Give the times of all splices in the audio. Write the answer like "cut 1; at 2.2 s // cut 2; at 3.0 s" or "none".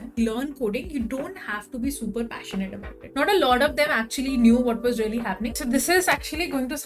cut 1; at 3.0 s // cut 2; at 5.5 s